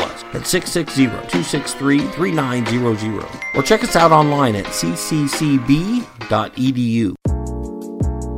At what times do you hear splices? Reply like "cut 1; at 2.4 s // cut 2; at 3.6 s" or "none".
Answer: cut 1; at 7.2 s